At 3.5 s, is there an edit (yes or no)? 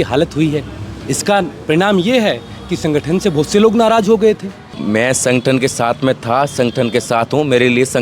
no